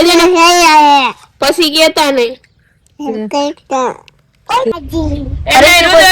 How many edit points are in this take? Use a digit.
1